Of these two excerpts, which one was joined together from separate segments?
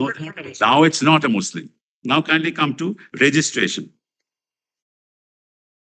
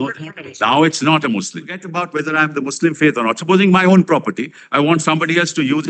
second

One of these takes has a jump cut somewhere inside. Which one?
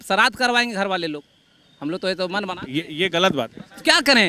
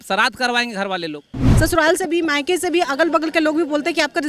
second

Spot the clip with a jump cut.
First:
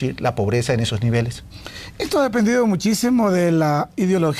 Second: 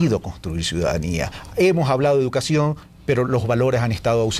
second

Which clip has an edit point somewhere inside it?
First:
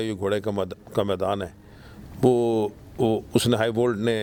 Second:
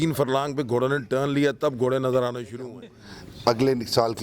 second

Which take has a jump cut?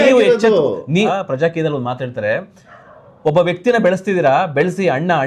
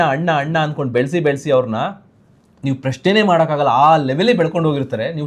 first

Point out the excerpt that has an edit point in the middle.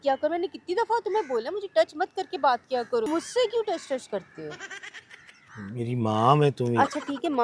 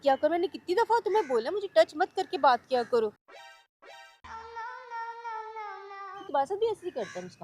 first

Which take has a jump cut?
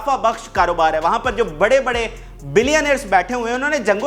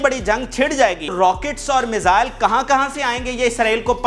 second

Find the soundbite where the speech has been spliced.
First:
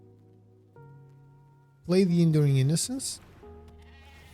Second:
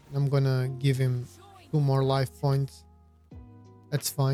first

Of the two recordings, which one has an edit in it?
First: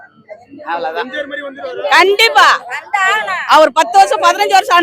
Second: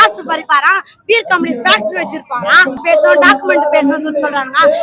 second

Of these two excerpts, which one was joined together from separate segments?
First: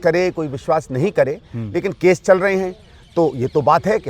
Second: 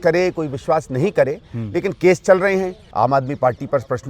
second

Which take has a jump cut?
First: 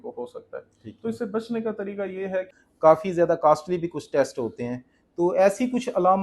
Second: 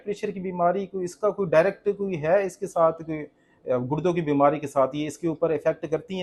first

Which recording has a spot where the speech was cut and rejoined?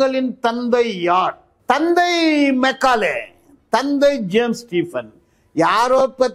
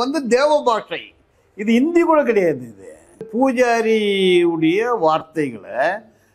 second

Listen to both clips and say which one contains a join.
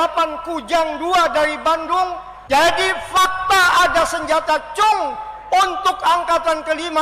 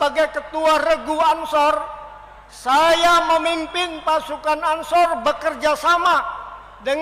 first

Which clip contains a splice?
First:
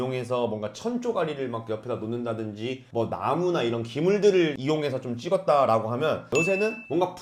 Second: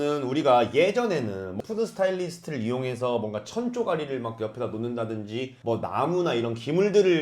second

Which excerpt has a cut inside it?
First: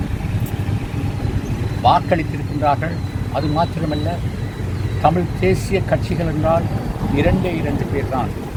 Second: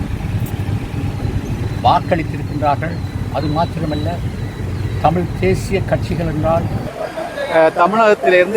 second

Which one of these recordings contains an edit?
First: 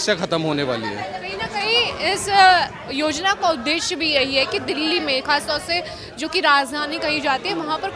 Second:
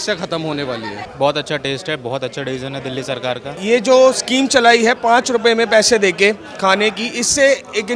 second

